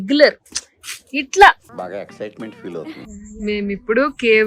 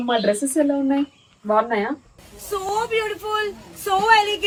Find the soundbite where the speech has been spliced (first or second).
first